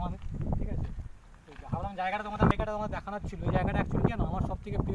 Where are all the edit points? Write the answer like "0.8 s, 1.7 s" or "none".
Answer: 2.5 s